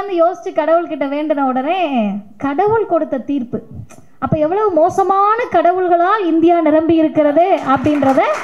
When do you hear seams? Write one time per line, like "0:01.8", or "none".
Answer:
none